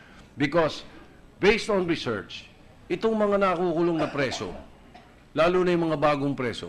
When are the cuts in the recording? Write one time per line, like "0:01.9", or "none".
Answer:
0:02.4